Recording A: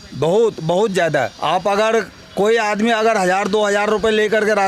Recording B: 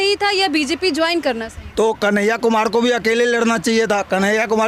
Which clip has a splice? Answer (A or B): A